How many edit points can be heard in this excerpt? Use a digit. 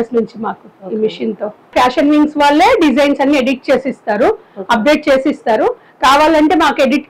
1